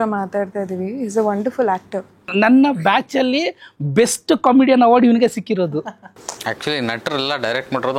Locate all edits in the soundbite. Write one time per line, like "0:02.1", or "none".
0:02.2
0:06.0